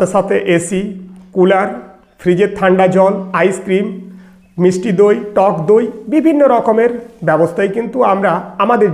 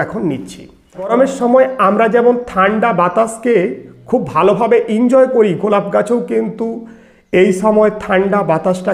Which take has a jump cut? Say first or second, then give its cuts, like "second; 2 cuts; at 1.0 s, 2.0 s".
second; 1 cut; at 1.1 s